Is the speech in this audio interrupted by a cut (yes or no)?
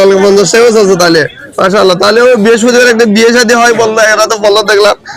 no